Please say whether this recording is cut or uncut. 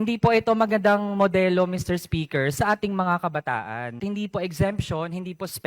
cut